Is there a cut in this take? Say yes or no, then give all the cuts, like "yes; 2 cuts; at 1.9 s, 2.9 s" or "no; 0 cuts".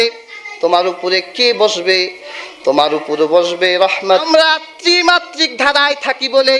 yes; 1 cut; at 4.2 s